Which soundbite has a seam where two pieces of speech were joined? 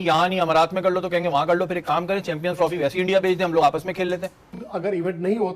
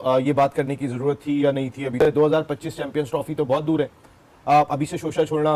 first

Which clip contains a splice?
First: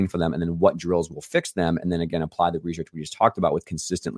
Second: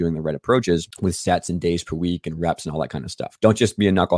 second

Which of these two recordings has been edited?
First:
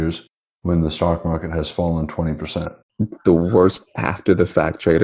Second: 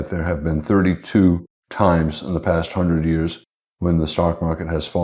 first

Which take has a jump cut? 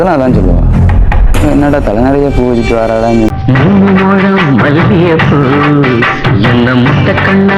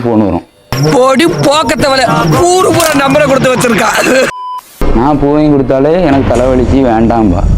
second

